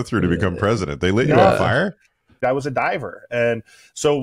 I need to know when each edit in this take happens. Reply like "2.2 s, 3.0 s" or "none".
2.3 s